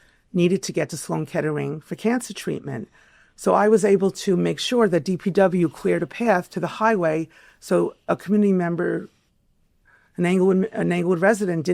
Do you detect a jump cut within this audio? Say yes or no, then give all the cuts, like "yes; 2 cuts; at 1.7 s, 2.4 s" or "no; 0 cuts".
no; 0 cuts